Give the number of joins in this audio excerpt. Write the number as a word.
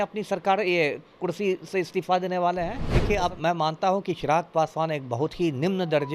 one